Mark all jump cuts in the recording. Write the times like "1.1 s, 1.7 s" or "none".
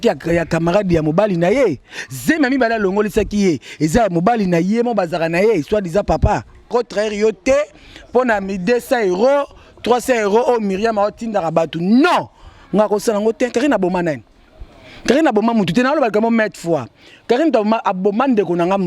6.7 s